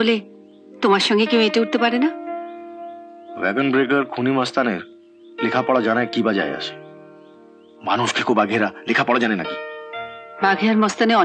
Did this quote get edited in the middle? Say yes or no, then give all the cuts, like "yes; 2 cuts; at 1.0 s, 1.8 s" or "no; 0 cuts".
no; 0 cuts